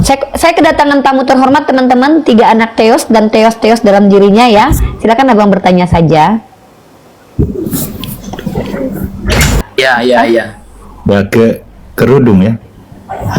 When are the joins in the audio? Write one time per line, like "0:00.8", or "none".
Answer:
0:09.6